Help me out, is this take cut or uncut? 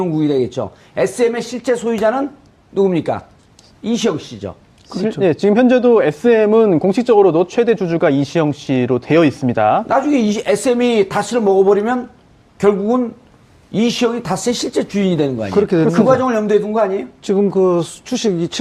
uncut